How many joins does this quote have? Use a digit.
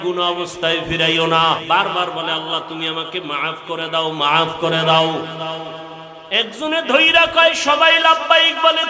1